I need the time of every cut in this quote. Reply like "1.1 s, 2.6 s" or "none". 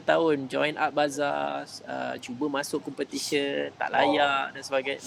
none